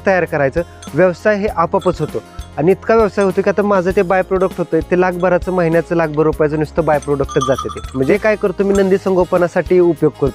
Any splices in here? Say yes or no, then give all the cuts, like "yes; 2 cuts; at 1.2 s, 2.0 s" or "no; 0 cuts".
yes; 1 cut; at 8.1 s